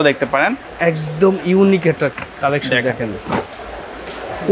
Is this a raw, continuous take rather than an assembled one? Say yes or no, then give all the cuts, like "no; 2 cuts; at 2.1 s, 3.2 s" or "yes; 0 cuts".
yes; 0 cuts